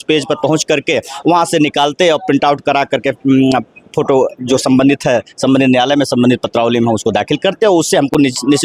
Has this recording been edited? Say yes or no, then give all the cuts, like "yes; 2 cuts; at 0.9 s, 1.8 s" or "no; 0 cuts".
no; 0 cuts